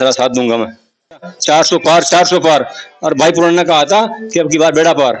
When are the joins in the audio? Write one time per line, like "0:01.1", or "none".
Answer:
0:01.3